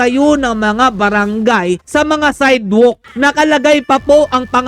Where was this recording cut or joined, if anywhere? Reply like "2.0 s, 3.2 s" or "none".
3.1 s